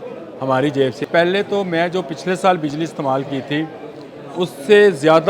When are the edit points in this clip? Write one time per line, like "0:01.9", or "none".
0:01.1